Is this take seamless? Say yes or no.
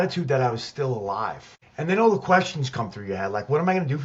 yes